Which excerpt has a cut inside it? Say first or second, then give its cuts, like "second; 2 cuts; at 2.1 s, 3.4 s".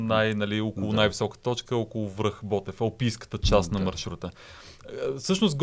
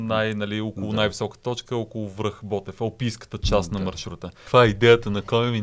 second; 1 cut; at 4.4 s